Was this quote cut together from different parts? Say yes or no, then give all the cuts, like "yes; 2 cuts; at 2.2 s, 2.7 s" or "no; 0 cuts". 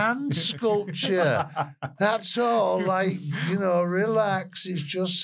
no; 0 cuts